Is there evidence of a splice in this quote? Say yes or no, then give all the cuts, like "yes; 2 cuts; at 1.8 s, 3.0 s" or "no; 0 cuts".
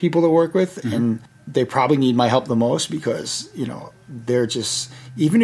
yes; 1 cut; at 1.3 s